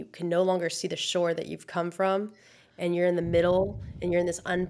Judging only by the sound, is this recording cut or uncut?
uncut